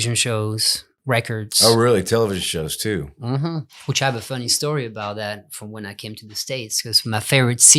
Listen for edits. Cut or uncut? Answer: cut